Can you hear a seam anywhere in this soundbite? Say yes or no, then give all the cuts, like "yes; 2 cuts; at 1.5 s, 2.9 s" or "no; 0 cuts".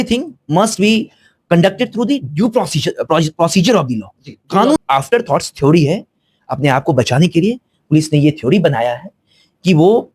yes; 1 cut; at 4.8 s